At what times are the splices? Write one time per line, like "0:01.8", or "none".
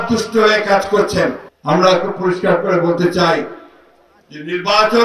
0:01.5